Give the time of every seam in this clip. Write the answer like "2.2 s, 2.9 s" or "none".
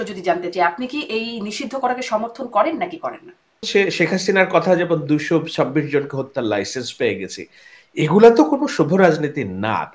3.6 s